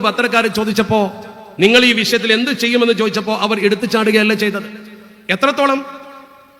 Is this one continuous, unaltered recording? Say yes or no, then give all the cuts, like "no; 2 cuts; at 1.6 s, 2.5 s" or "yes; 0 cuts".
yes; 0 cuts